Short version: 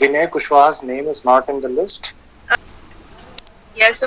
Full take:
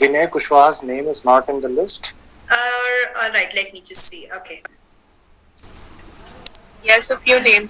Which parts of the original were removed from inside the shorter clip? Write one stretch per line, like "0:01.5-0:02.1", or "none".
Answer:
0:02.6-0:05.6